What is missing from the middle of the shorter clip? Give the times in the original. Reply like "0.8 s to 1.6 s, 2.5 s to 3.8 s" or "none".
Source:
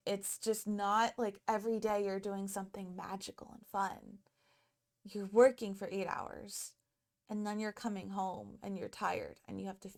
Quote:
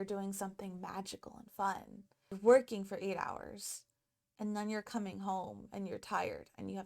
4.5 s to 5.2 s